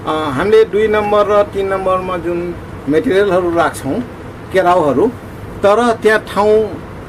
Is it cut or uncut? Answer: uncut